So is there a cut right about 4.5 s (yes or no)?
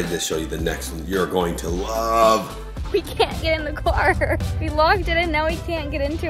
yes